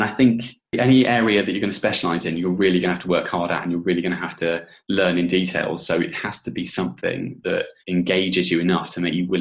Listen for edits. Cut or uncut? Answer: cut